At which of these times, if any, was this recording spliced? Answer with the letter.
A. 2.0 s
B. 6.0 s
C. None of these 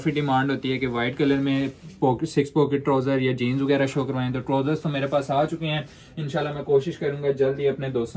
C